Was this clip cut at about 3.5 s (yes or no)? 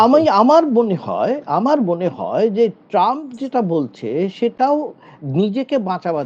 no